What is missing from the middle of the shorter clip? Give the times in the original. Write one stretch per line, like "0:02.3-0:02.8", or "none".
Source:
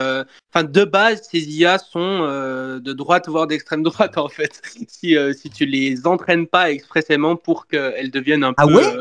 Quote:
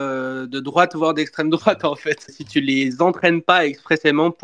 0:04.7-0:05.5